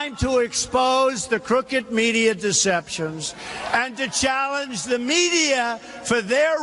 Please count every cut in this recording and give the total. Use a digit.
0